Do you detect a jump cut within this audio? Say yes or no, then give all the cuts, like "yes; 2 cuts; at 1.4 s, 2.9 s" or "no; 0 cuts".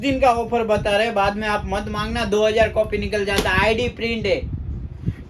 no; 0 cuts